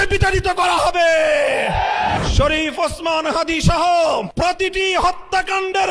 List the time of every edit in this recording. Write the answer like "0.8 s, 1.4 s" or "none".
2.2 s, 4.3 s